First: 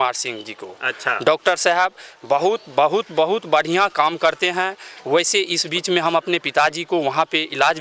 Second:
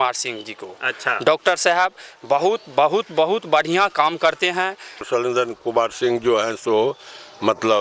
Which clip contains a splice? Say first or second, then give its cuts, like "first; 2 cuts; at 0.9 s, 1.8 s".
second; 1 cut; at 5.0 s